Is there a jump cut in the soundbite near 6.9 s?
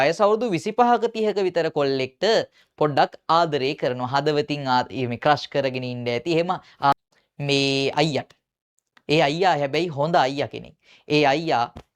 yes; 1 cut; at 6.9 s

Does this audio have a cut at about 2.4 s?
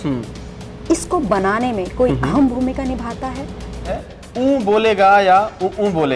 no; 1 cut; at 4.0 s

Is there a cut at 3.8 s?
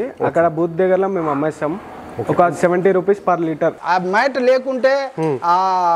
yes; 1 cut; at 3.8 s

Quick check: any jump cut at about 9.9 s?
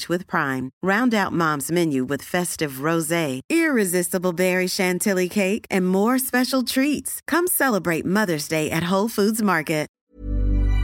yes; 1 cut; at 9.9 s

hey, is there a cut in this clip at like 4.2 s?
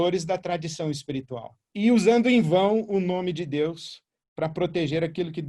no; 1 cut; at 1.7 s

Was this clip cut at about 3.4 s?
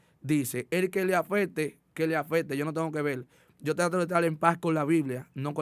no; 0 cuts

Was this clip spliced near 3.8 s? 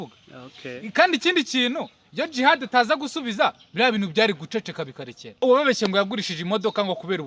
no; 1 cut; at 5.2 s

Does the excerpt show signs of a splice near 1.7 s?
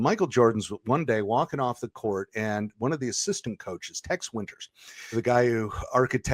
no; 1 cut; at 5.1 s

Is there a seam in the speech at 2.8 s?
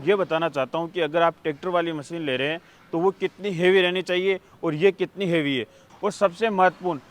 no; 1 cut; at 5.9 s

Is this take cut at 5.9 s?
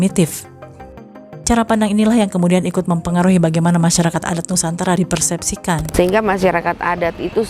yes; 1 cut; at 5.9 s

